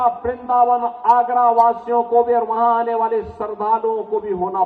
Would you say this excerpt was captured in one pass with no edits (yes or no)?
yes